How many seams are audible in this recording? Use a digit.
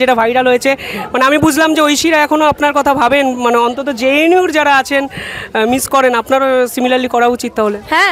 0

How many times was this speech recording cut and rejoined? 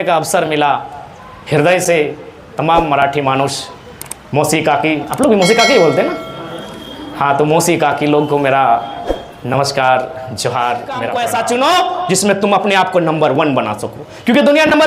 1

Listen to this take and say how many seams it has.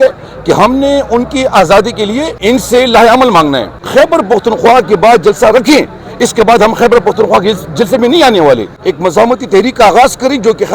3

